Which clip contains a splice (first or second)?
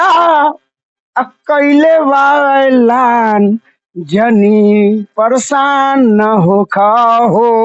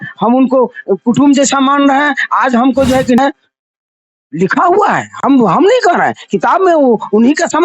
second